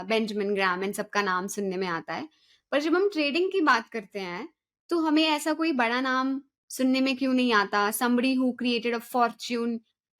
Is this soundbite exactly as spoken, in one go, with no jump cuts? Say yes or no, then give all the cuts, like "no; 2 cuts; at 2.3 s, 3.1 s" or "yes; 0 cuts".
yes; 0 cuts